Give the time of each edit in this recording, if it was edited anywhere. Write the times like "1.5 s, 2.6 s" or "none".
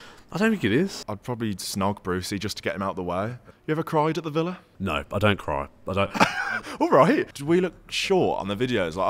1.0 s, 3.4 s, 7.3 s